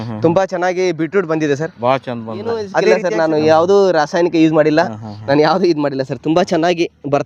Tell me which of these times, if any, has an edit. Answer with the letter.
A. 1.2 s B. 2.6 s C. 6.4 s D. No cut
B